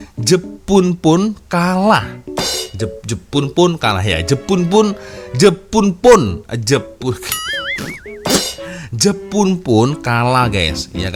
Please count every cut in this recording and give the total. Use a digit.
0